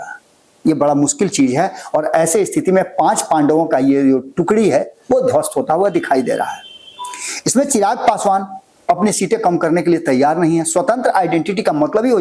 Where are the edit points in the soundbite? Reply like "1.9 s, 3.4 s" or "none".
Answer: none